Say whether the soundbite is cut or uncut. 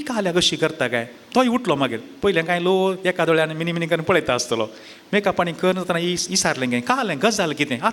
uncut